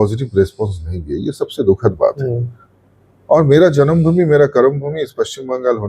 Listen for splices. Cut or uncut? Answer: uncut